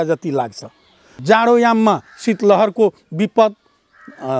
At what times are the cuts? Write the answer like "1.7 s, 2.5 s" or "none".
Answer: 1.1 s